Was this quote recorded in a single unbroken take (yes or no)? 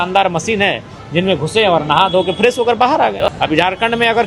no